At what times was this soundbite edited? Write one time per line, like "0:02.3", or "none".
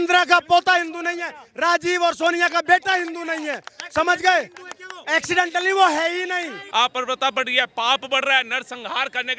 0:06.6